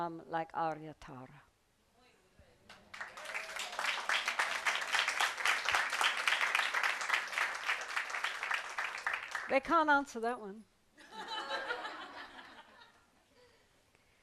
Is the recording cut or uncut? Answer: uncut